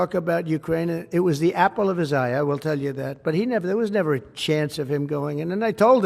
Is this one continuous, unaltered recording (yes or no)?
yes